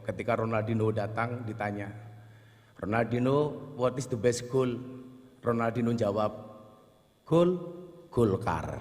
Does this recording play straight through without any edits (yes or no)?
yes